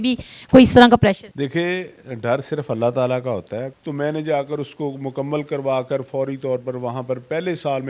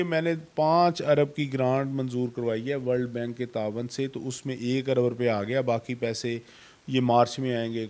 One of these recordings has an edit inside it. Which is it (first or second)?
first